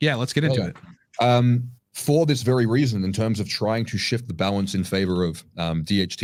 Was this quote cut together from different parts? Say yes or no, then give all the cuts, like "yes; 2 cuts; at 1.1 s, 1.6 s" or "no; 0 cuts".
no; 0 cuts